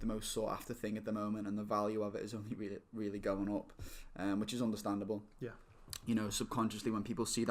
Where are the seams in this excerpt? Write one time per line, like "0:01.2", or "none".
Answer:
none